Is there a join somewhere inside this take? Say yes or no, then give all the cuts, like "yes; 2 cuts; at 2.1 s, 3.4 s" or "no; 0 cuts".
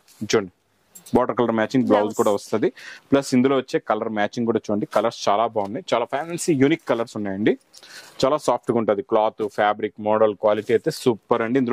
no; 0 cuts